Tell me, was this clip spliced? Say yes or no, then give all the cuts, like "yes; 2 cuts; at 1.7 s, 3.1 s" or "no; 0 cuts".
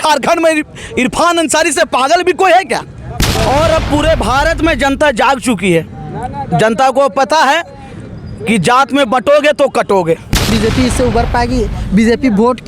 yes; 2 cuts; at 3.3 s, 10.5 s